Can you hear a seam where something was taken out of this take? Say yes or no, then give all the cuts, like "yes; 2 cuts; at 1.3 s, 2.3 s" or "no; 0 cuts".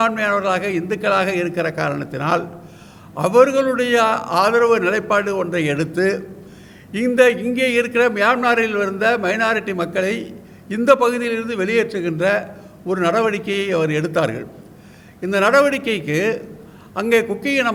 no; 0 cuts